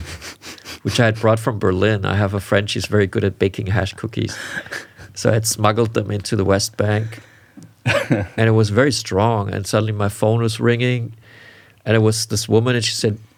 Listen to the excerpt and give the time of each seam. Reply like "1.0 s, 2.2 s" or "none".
none